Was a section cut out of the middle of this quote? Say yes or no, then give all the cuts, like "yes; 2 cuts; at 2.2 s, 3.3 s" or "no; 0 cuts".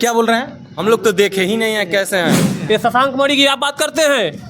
yes; 1 cut; at 2.6 s